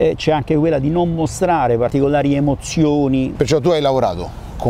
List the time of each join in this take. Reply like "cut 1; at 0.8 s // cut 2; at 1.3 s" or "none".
cut 1; at 1.9 s // cut 2; at 3.3 s